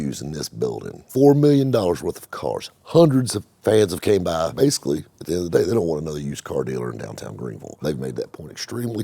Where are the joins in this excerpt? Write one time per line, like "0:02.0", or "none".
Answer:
0:00.9
0:04.5
0:07.8